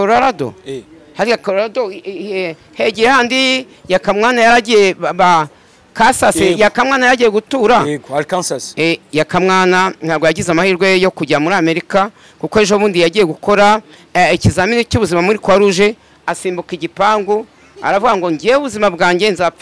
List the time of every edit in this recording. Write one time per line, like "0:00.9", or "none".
none